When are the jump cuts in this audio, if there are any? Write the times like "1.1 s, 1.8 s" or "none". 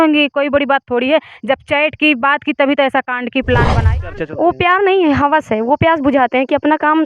4.1 s

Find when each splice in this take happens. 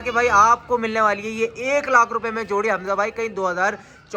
none

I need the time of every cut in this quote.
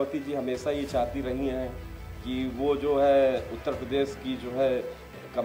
none

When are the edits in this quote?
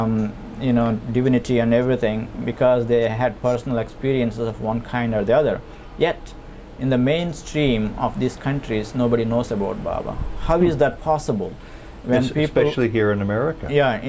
none

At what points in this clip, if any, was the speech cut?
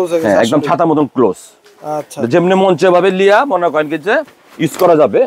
none

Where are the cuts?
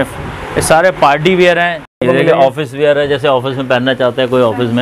2.0 s

